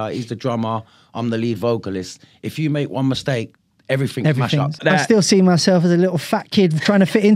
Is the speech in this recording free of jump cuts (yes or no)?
no